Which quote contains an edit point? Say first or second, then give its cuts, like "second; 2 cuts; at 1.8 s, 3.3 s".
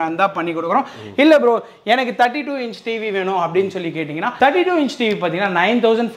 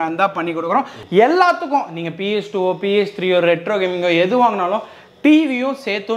second; 1 cut; at 1.0 s